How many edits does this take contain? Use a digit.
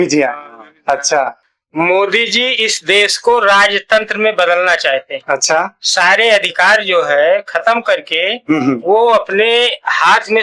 1